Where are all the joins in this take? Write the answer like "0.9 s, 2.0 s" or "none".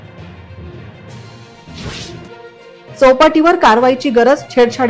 1.1 s